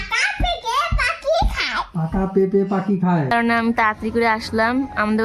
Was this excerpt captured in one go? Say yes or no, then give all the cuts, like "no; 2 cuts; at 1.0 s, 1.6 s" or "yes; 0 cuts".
no; 1 cut; at 3.3 s